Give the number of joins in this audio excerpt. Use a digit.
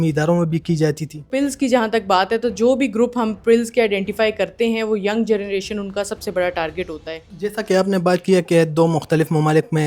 2